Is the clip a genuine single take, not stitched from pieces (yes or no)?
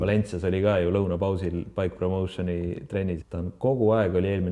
no